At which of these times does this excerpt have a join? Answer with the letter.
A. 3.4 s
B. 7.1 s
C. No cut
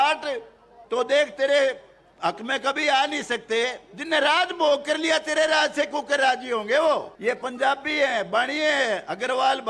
B